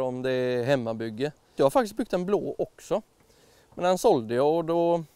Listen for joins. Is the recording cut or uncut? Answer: cut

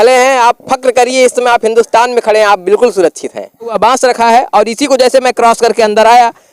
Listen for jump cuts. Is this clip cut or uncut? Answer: cut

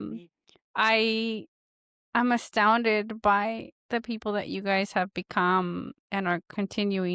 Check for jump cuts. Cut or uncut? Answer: uncut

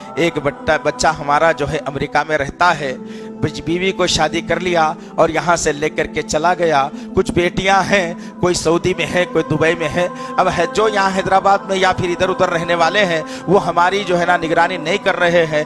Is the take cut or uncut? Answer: uncut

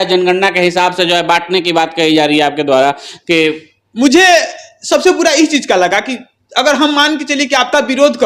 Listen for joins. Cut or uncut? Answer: uncut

